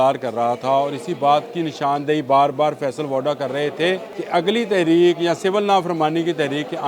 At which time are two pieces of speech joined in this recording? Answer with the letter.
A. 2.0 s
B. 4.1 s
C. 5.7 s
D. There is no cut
B